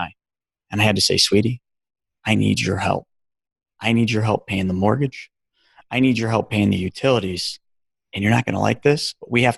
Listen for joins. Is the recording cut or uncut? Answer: uncut